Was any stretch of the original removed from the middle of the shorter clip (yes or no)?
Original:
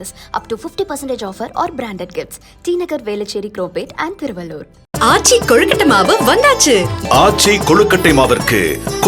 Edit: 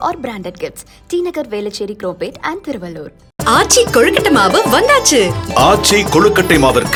no